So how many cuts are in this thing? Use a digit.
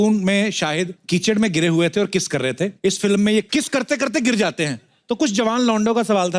3